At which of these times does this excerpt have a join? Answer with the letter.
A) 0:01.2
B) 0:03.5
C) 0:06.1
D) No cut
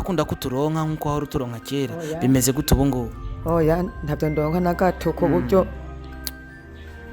C